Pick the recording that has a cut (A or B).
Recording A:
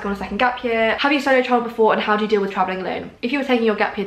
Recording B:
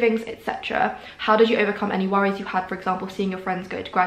A